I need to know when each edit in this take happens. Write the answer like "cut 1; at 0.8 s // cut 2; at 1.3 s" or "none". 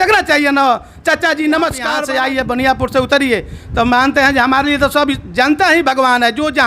cut 1; at 1.9 s